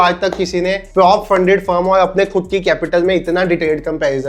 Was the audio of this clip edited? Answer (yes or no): no